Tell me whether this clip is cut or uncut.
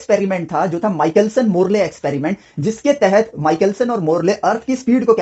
uncut